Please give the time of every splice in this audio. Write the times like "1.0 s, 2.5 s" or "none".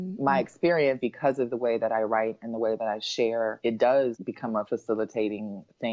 1.0 s, 3.6 s, 4.5 s